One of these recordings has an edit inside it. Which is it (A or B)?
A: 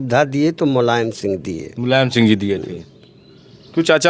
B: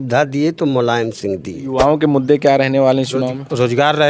B